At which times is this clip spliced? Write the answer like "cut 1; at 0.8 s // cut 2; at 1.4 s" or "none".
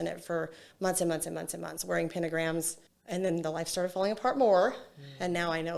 cut 1; at 2.9 s